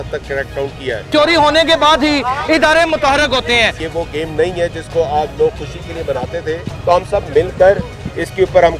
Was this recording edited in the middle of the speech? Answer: yes; 3 cuts; at 1.1 s, 3.8 s, 6.7 s

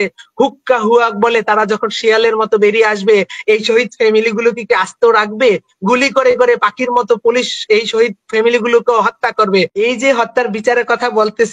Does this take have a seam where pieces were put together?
yes; 1 cut; at 9.7 s

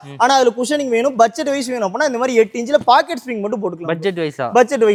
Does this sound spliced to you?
no; 0 cuts

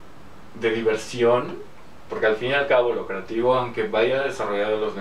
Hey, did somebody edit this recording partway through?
no; 0 cuts

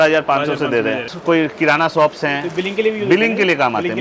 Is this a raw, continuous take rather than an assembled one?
no; 1 cut; at 1.1 s

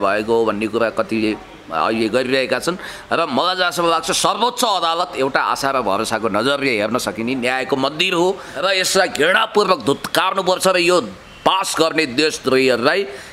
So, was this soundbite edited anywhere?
yes; 1 cut; at 8.6 s

